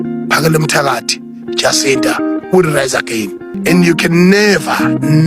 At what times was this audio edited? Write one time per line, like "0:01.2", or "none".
0:03.5

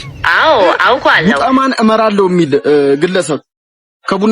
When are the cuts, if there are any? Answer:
0:01.2

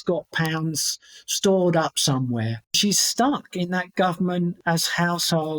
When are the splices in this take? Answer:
0:02.7
0:04.6

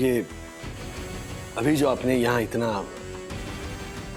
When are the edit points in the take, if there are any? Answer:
none

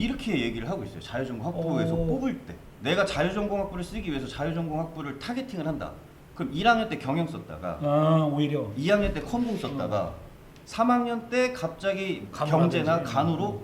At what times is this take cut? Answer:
0:12.3

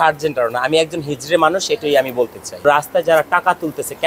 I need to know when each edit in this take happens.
0:02.6

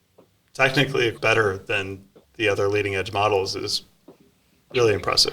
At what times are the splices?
0:01.1

